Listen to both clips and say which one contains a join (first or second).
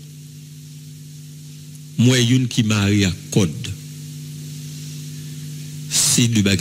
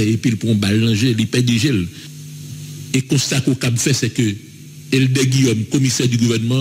second